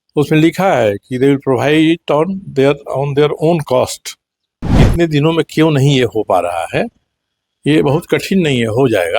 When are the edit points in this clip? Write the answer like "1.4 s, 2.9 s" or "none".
4.8 s